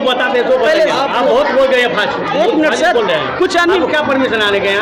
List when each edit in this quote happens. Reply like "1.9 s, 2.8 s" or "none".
none